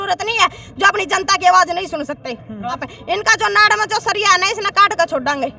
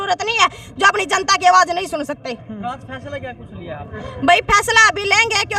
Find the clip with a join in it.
first; 1 cut; at 2.9 s

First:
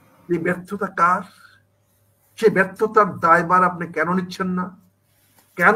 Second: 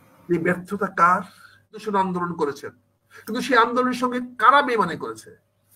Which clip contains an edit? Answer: second; 1 cut; at 1.8 s

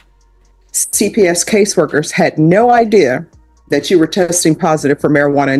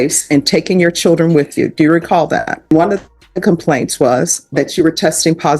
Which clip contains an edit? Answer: second; 1 cut; at 2.7 s

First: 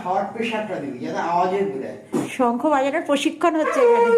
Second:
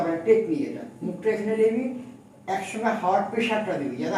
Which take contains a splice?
first; 1 cut; at 2.3 s

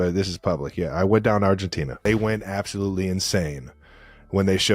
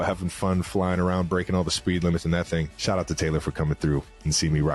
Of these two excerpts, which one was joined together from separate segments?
first; 1 cut; at 1.9 s

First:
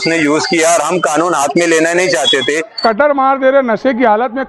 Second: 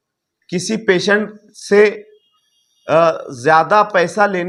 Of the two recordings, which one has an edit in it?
first; 1 cut; at 2.7 s

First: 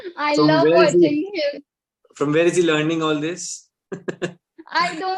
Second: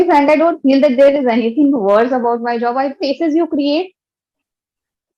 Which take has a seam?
second; 1 cut; at 3.0 s

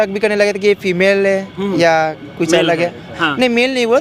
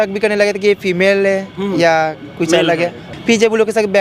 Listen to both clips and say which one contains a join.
second; 1 cut; at 3.1 s

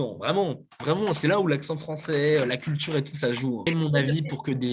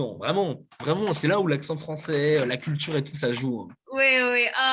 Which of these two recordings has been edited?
first; 1 cut; at 3.7 s

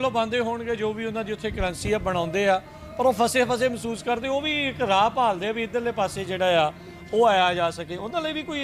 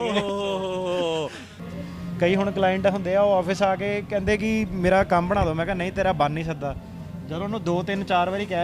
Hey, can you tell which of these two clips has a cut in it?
second; 1 cut; at 1.6 s

